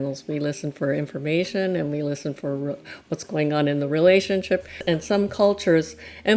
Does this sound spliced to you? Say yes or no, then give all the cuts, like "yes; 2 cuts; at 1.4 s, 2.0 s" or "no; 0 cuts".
yes; 1 cut; at 4.8 s